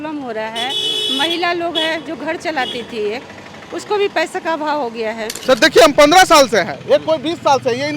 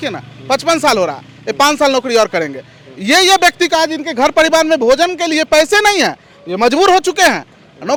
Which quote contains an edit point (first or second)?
first